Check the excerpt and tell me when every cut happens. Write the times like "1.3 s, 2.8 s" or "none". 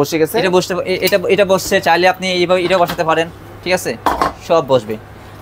none